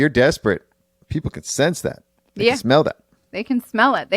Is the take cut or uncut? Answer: uncut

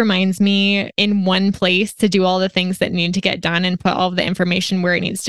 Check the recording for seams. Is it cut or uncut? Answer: cut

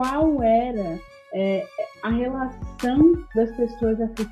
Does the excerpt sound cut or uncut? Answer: uncut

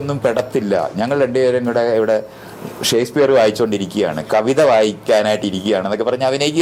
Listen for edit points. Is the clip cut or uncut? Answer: uncut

